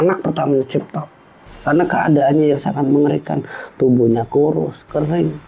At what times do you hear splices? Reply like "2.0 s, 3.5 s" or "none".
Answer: 1.6 s

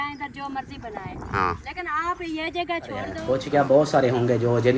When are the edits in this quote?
3.2 s

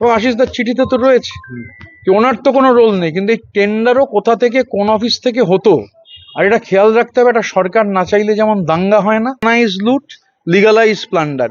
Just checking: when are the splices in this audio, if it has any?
9.4 s

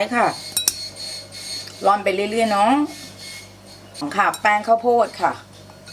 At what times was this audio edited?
4.1 s

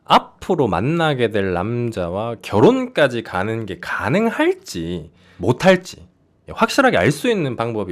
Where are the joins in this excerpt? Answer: none

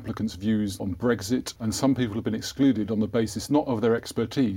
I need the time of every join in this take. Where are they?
0.8 s, 1.5 s

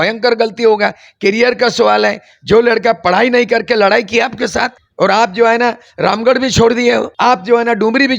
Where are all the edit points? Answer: 4.8 s, 7.1 s

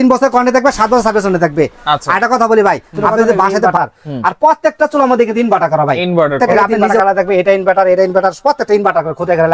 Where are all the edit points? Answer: 3.7 s, 6.8 s

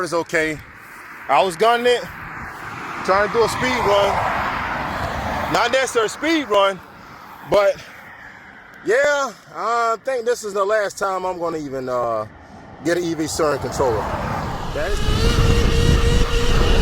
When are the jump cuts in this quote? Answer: 14.6 s

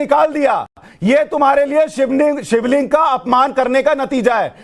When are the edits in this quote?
none

